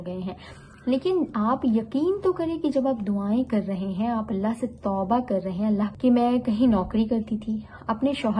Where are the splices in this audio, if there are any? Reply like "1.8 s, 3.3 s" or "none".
5.9 s